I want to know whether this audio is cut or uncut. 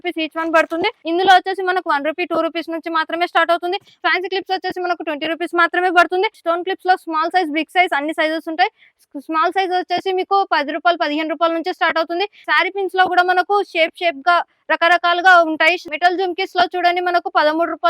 cut